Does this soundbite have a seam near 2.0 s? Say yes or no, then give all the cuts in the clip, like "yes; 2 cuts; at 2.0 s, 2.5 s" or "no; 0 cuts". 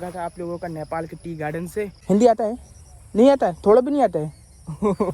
yes; 1 cut; at 2.0 s